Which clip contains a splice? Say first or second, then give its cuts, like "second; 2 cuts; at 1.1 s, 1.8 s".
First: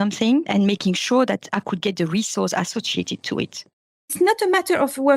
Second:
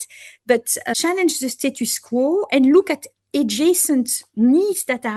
first; 1 cut; at 3.7 s